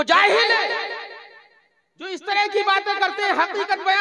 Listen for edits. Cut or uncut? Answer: uncut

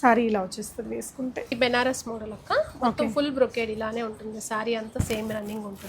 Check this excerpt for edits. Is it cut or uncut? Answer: cut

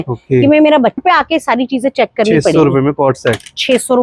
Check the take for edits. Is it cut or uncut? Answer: cut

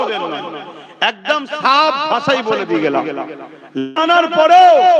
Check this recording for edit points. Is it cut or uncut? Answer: cut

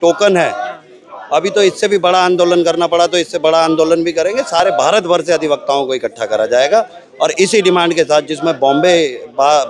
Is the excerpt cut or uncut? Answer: uncut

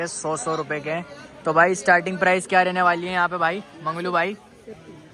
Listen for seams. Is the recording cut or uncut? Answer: uncut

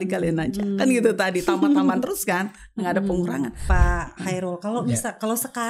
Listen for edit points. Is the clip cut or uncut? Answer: cut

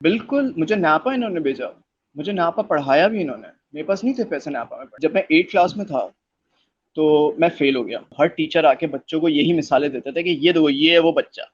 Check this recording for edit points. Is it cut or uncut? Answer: cut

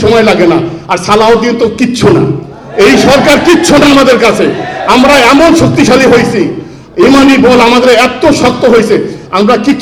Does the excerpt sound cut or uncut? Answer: uncut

